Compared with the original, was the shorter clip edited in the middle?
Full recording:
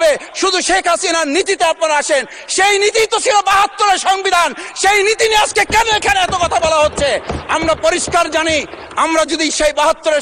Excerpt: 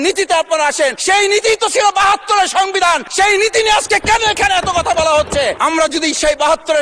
yes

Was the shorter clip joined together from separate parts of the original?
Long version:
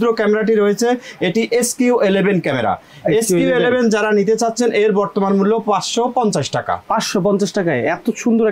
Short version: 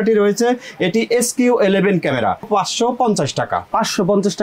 yes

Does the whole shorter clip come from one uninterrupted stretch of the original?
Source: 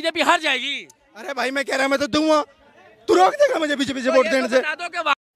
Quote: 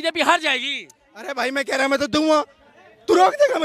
yes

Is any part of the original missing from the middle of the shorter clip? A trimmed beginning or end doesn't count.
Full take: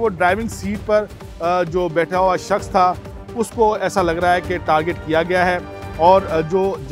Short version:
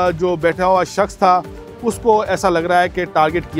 no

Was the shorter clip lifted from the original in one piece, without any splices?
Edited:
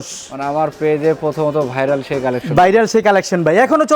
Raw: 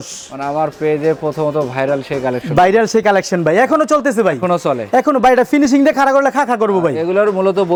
yes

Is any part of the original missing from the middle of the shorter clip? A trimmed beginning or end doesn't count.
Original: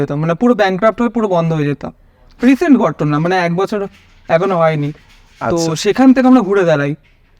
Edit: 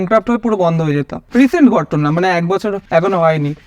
yes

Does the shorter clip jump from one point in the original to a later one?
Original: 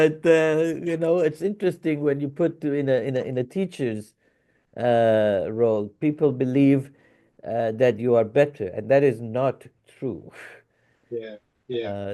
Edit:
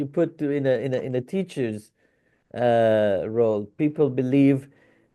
no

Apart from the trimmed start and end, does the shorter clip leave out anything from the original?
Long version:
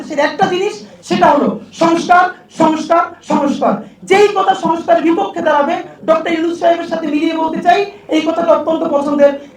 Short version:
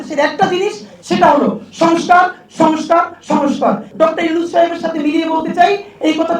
yes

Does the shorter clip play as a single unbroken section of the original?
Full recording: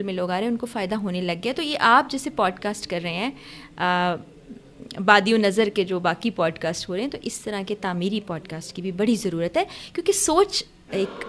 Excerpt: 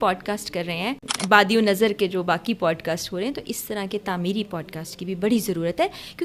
no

